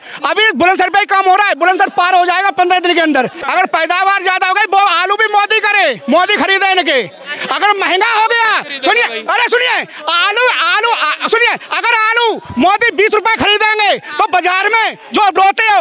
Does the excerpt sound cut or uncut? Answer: cut